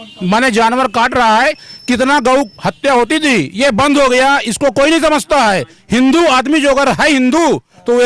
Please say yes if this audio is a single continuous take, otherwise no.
yes